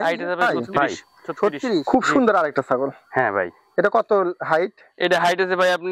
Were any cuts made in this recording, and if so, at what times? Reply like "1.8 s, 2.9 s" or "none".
1.8 s